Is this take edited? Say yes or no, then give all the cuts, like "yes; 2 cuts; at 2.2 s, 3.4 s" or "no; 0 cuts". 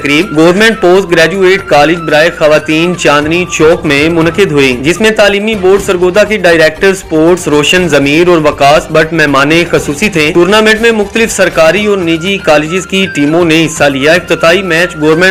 no; 0 cuts